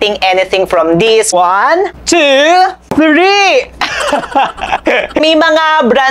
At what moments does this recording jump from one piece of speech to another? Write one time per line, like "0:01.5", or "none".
0:01.4
0:05.2